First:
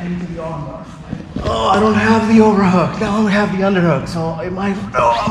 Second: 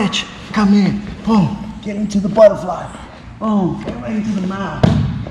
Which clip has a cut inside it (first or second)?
first